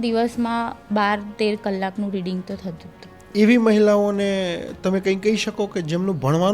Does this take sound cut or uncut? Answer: cut